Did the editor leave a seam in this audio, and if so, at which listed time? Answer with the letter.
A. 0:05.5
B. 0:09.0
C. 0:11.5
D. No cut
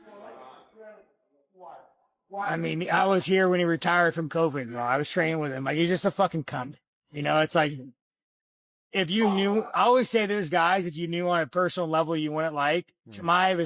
D